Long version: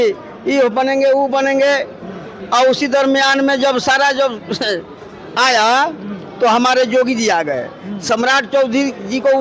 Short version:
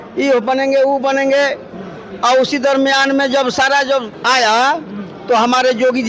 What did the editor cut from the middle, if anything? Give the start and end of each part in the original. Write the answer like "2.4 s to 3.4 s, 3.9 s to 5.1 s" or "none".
4.4 s to 5.3 s